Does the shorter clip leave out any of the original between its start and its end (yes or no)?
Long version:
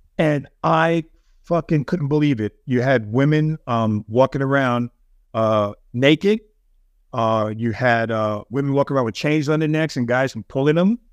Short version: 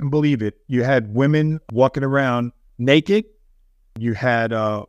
yes